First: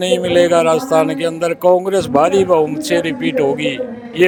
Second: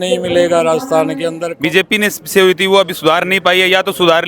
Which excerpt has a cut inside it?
second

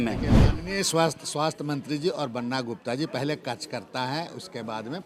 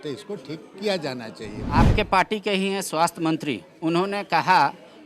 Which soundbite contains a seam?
second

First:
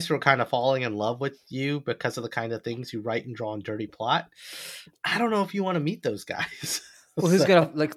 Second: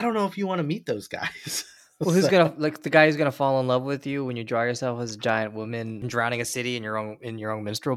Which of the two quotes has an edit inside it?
second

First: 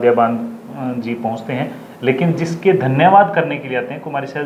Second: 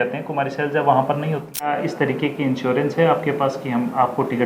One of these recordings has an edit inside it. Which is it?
second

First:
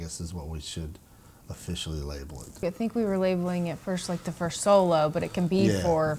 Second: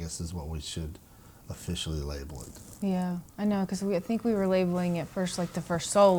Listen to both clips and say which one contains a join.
first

